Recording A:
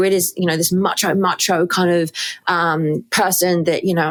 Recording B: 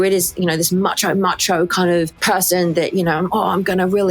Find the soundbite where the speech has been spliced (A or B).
B